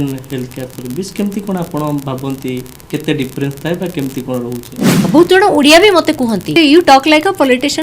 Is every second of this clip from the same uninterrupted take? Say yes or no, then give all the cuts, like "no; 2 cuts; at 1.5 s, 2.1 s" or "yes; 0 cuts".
no; 2 cuts; at 5.1 s, 6.6 s